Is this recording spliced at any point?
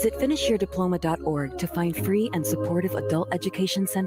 no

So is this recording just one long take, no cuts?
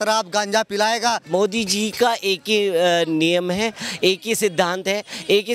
no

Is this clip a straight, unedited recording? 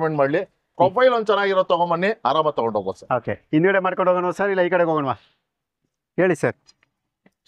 yes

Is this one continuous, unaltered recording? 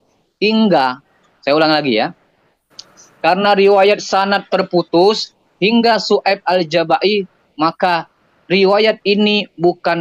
yes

